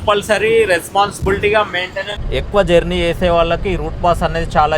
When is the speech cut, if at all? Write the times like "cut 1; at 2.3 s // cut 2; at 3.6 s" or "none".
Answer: cut 1; at 2.1 s